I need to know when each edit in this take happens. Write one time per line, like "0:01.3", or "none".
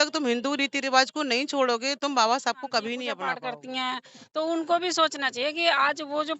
0:03.3